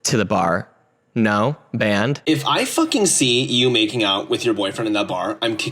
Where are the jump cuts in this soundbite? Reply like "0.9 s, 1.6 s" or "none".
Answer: 2.2 s